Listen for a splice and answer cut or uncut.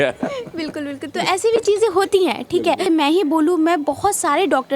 cut